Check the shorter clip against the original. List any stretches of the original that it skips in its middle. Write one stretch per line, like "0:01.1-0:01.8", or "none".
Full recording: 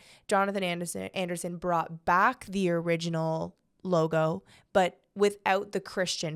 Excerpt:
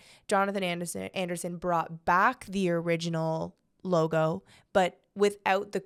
none